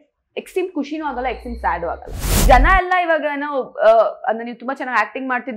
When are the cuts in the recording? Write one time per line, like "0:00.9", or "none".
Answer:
0:02.4